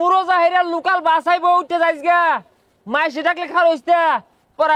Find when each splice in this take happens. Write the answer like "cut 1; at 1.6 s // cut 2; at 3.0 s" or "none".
none